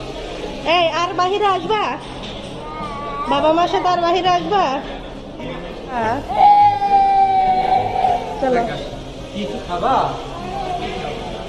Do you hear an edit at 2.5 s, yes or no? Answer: no